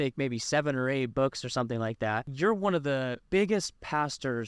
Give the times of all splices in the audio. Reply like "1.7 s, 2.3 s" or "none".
2.3 s, 3.2 s